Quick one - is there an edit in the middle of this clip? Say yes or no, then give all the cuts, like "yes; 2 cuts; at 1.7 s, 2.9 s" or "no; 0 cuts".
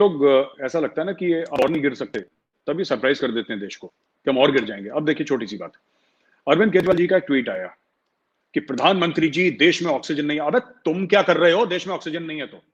no; 0 cuts